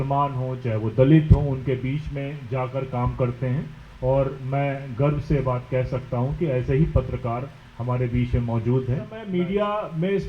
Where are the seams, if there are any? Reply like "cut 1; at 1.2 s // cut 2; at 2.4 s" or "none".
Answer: cut 1; at 9.2 s